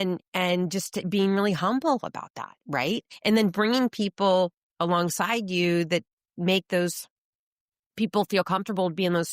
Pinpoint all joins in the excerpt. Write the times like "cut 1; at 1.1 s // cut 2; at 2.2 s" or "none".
cut 1; at 3.1 s